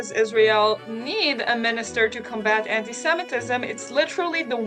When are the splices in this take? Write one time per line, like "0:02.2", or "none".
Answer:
none